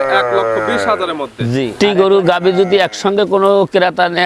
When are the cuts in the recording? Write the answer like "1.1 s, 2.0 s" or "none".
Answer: 1.7 s